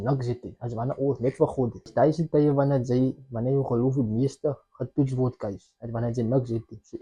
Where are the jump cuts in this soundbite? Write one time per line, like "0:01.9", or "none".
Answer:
0:01.9